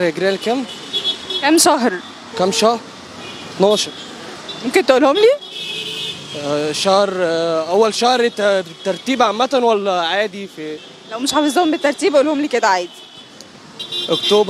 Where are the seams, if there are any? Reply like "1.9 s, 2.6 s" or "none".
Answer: none